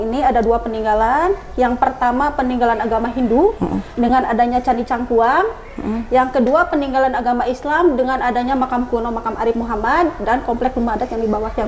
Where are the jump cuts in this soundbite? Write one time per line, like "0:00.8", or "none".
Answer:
none